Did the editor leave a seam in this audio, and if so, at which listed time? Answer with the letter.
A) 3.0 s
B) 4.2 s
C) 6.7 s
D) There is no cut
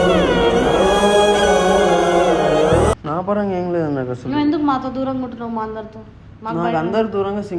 A